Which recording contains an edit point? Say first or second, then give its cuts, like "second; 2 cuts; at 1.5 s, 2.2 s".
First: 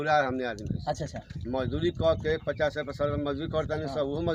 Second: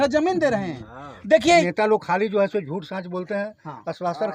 second; 1 cut; at 1.6 s